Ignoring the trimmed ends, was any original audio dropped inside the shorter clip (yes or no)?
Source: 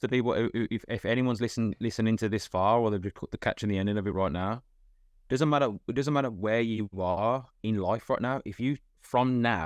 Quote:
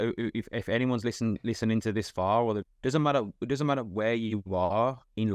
yes